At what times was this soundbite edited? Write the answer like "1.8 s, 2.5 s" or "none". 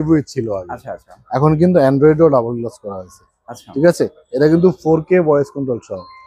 none